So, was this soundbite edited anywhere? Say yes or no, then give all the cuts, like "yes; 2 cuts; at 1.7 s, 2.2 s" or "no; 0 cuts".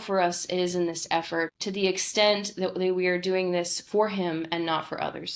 no; 0 cuts